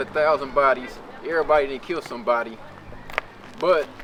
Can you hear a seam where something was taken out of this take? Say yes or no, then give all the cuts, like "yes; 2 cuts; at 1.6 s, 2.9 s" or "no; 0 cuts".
no; 0 cuts